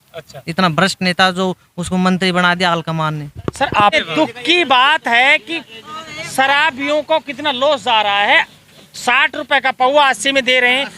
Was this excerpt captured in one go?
no; 1 cut; at 3.9 s

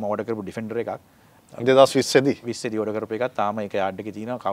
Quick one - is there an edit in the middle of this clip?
no; 0 cuts

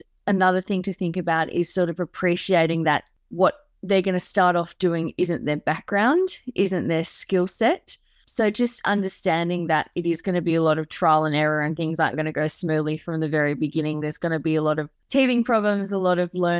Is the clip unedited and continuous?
no; 2 cuts; at 3.2 s, 14.9 s

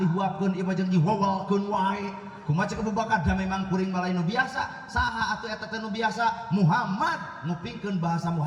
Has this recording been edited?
no; 0 cuts

